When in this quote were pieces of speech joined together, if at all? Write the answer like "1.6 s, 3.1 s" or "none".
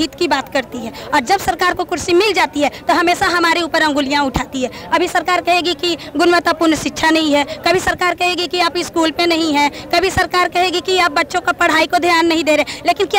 none